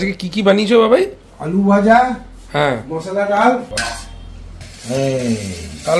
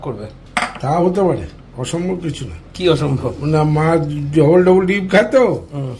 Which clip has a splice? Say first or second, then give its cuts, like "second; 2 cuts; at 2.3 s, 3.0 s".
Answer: first; 1 cut; at 3.7 s